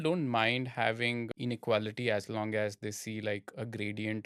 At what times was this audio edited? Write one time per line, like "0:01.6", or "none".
0:01.2